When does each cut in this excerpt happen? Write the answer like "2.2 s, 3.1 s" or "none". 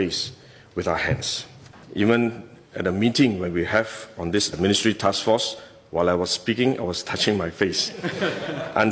1.8 s